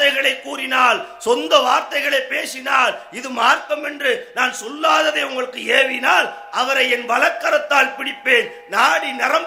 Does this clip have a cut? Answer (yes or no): no